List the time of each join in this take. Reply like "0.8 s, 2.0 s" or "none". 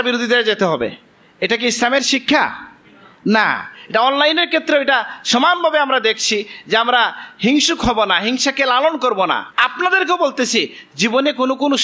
9.5 s